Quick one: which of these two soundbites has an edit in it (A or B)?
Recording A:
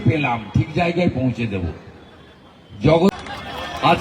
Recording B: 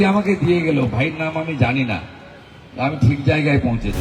A